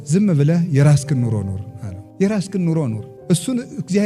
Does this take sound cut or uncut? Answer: uncut